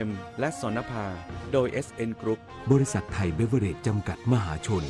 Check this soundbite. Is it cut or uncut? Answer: cut